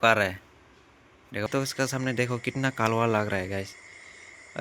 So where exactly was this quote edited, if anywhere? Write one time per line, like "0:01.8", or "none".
0:01.5